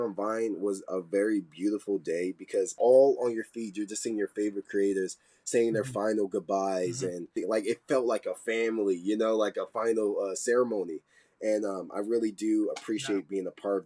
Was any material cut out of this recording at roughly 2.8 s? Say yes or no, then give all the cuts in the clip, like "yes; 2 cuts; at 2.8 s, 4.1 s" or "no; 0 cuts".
yes; 2 cuts; at 2.8 s, 7.3 s